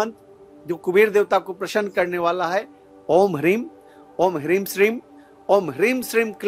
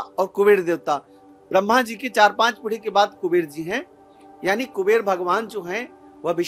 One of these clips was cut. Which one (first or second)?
second